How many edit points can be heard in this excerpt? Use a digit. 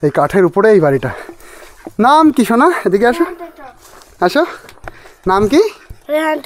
0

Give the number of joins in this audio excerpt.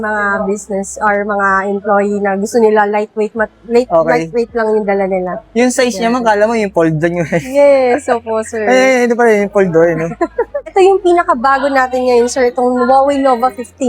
1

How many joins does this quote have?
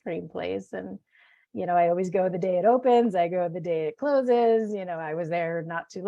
0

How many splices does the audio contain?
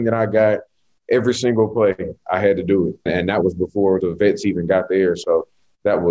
2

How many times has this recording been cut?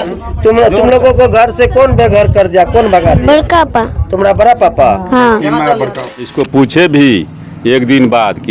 1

